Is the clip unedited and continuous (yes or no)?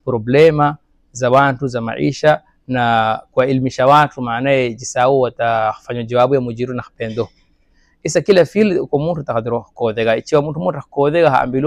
yes